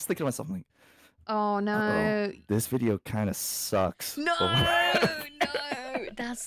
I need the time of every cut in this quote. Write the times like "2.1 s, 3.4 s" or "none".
none